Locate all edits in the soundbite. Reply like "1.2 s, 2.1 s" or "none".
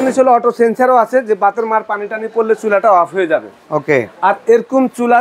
none